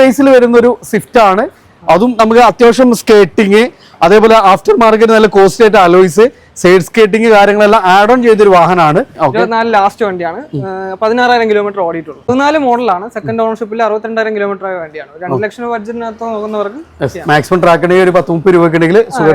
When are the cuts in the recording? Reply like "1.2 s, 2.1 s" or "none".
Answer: 9.4 s, 12.1 s